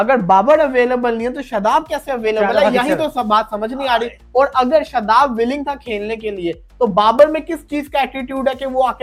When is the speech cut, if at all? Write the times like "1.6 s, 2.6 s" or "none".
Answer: none